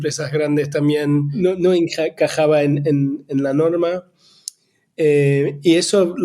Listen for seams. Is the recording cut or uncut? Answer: cut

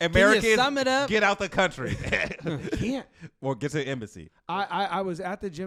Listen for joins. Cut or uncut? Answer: uncut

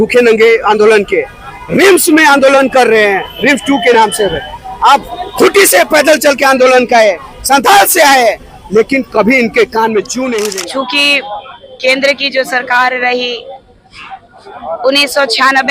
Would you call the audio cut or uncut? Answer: cut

